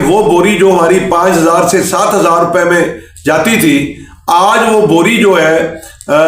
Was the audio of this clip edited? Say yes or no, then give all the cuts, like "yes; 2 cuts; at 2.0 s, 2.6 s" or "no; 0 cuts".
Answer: no; 0 cuts